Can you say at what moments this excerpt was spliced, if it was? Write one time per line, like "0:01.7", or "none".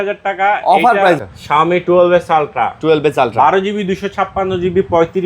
0:01.2